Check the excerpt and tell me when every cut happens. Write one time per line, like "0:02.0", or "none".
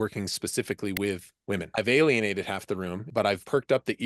0:01.7
0:03.3